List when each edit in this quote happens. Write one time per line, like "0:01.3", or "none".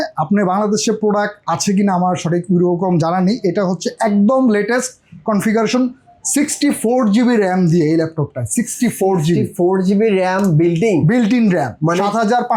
none